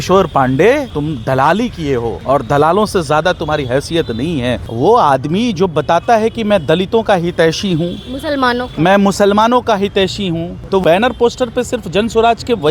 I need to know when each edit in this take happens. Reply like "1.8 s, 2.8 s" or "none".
0.9 s, 2.1 s, 4.7 s, 10.8 s